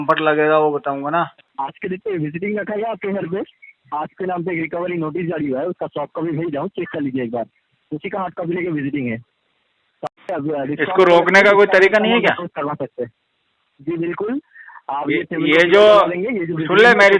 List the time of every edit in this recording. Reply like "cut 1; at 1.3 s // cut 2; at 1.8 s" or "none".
cut 1; at 1.4 s